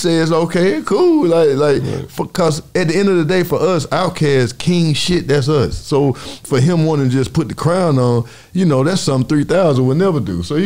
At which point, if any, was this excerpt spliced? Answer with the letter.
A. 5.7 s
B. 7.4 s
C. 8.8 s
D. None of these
D